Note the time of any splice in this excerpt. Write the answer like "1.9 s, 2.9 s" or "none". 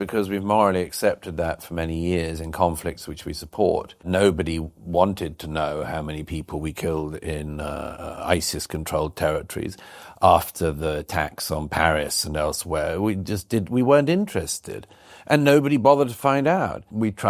2.4 s